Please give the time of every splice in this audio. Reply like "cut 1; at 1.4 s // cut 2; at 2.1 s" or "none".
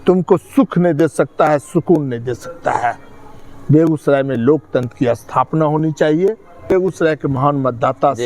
cut 1; at 6.7 s